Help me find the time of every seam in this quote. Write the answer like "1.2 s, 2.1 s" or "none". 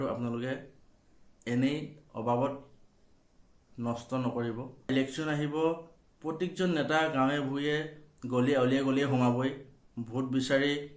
4.9 s

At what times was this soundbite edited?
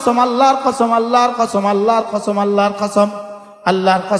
none

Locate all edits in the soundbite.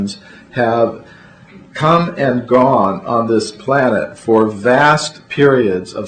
4.1 s

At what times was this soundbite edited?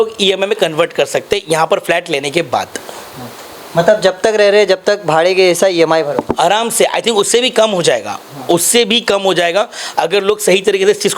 none

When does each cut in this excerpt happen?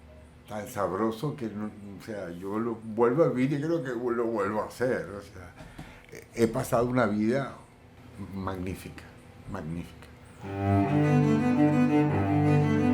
10.2 s

